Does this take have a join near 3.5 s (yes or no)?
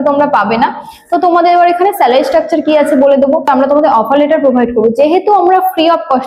yes